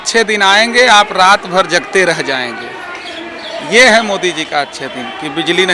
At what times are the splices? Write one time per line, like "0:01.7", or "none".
none